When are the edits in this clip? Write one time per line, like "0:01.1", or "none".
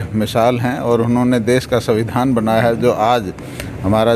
none